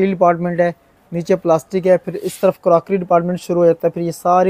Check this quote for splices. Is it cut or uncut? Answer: uncut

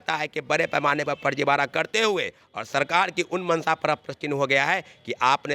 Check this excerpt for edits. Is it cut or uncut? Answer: uncut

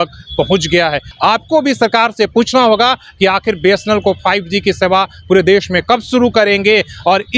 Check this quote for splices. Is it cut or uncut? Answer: cut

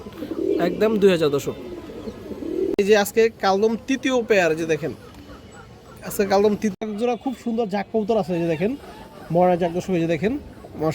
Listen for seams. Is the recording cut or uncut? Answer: cut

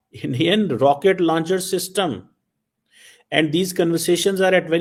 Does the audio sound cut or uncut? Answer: uncut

